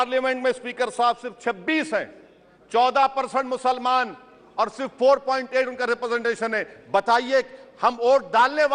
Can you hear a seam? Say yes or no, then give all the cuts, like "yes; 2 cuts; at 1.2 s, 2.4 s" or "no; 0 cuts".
no; 0 cuts